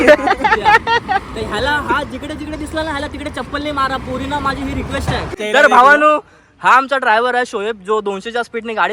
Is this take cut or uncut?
cut